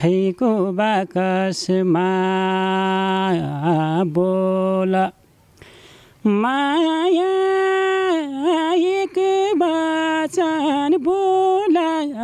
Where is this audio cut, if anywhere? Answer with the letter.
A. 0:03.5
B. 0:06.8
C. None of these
C